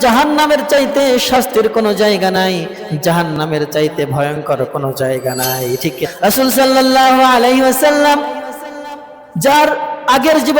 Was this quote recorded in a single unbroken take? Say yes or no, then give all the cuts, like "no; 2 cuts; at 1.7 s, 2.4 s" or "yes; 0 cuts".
no; 1 cut; at 6.1 s